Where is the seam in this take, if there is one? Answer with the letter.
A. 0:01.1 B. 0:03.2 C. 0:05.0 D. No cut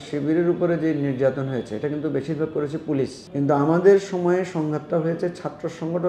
B